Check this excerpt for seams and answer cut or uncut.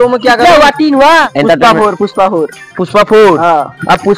cut